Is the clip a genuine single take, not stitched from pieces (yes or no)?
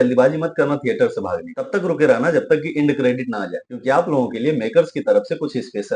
yes